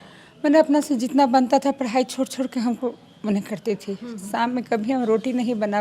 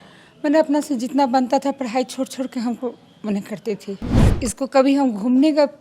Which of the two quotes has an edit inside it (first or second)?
second